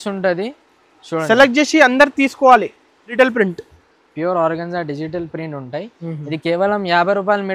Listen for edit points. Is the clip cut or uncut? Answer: cut